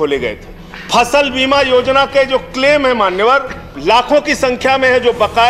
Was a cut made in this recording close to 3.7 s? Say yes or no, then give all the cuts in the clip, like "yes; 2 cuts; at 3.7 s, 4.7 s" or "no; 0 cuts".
yes; 1 cut; at 3.7 s